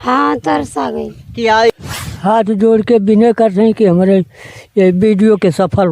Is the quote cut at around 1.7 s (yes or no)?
yes